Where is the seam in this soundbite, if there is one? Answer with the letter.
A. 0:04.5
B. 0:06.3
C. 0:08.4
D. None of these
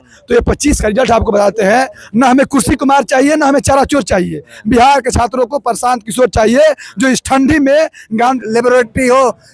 C